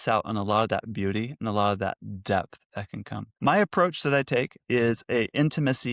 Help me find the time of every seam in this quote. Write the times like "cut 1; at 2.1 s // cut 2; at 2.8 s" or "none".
cut 1; at 3.2 s